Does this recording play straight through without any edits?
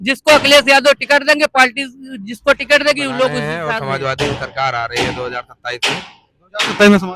no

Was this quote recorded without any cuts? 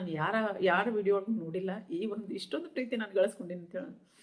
yes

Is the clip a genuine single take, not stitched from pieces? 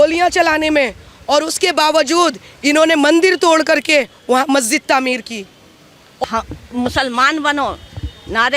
no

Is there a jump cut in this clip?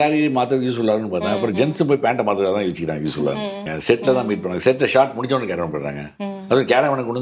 yes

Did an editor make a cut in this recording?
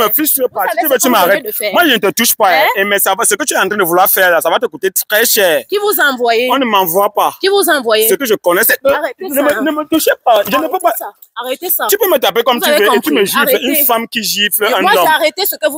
no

